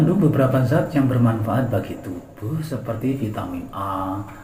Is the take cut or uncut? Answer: uncut